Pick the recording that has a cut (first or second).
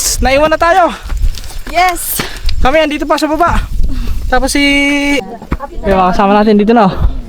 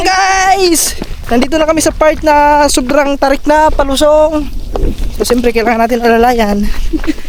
first